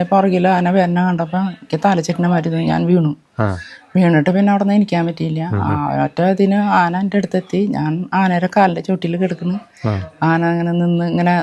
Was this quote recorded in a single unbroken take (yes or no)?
yes